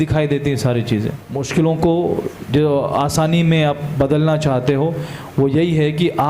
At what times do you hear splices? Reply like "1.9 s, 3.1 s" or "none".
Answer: 1.3 s